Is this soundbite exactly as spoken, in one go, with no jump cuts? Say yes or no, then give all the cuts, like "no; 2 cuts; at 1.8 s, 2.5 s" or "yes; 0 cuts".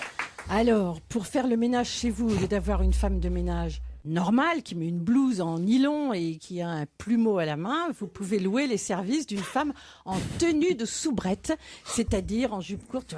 yes; 0 cuts